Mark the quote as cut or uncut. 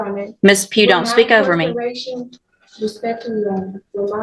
uncut